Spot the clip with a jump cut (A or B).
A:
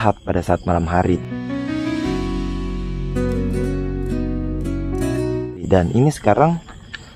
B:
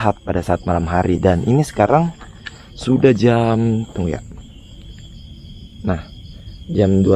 B